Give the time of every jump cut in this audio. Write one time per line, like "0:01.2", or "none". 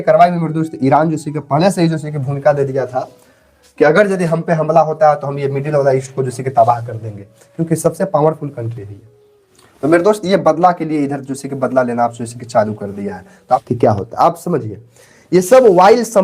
0:13.6